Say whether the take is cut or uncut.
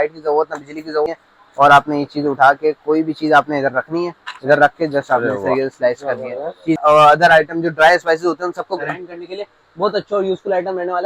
cut